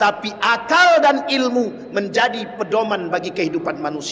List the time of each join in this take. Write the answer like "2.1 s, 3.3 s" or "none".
none